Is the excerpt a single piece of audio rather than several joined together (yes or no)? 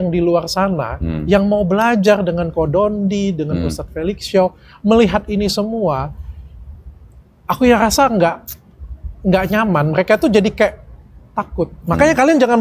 yes